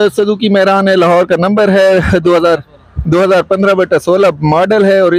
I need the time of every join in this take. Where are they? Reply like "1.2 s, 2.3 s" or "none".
none